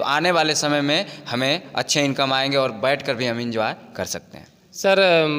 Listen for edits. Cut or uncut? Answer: uncut